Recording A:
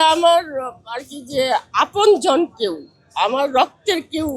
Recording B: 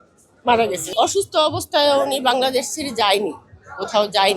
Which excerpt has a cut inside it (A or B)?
B